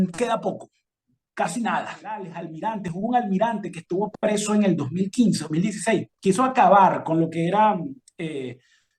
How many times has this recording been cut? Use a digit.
2